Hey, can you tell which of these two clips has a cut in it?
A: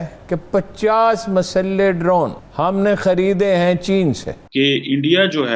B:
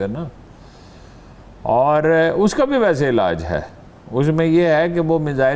A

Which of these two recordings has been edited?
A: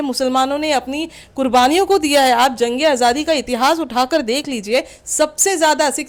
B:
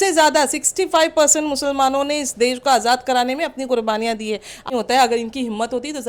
B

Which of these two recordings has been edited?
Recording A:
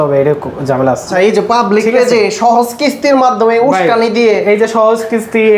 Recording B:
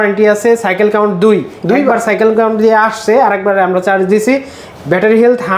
A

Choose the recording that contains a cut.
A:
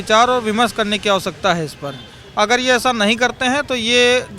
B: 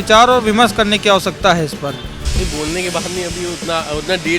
B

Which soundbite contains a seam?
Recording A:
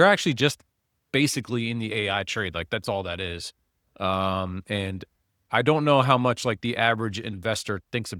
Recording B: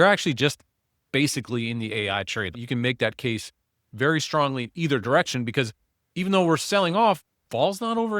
B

